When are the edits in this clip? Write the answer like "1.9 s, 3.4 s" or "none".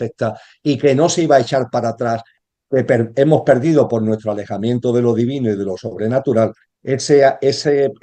2.4 s